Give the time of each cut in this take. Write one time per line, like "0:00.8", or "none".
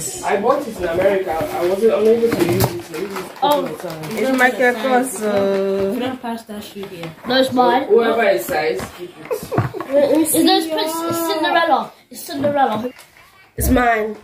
0:12.9